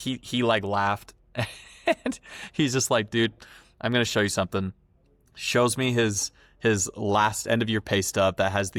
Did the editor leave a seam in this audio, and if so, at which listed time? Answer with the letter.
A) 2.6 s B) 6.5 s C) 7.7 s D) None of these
D